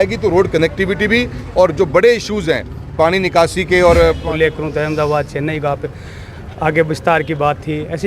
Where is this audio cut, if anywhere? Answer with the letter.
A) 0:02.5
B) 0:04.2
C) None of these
B